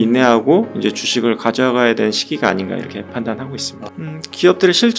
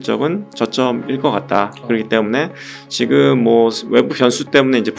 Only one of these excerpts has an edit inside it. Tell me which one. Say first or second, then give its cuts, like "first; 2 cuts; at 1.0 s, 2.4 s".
first; 1 cut; at 3.7 s